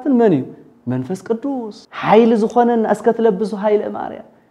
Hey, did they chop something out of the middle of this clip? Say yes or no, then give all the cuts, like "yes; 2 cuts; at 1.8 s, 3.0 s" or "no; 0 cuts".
yes; 1 cut; at 1.8 s